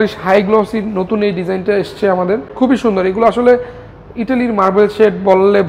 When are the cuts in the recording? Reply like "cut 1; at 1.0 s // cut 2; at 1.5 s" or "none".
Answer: cut 1; at 2.5 s